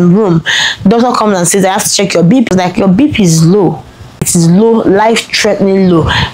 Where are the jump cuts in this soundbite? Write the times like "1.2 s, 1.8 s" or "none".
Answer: 2.5 s, 4.3 s

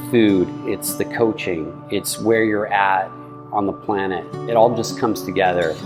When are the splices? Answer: none

